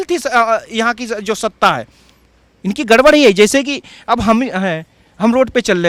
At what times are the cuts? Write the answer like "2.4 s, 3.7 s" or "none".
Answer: none